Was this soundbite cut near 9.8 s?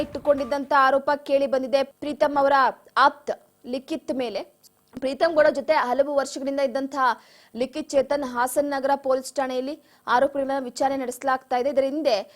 no; 2 cuts; at 1.9 s, 4.6 s

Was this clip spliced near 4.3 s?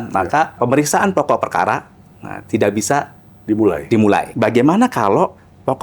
yes; 1 cut; at 4.3 s

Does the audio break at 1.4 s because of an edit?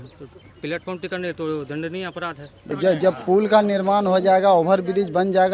no; 1 cut; at 2.6 s

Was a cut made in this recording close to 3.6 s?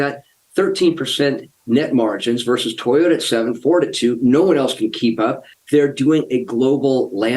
no; 2 cuts; at 1.5 s, 5.5 s

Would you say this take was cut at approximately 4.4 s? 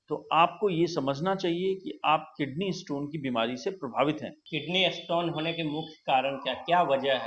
yes; 1 cut; at 4.4 s

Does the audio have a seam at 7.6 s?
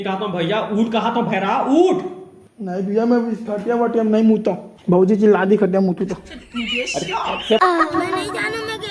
yes; 1 cut; at 7.6 s

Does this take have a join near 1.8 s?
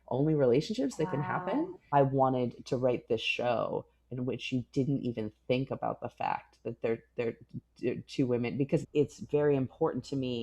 yes; 2 cuts; at 1.8 s, 8.8 s

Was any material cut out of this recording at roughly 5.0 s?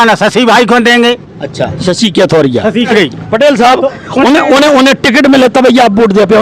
no; 1 cut; at 2.9 s

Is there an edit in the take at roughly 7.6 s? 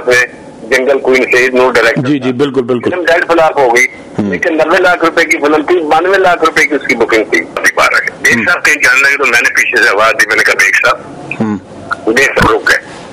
yes; 1 cut; at 7.6 s

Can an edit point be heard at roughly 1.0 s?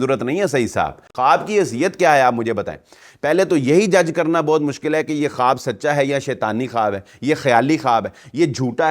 yes; 1 cut; at 1.0 s

